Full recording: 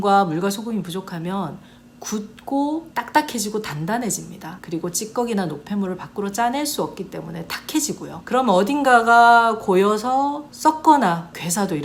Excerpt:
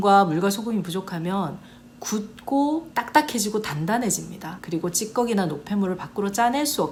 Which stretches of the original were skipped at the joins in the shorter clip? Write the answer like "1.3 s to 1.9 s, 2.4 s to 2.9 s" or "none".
none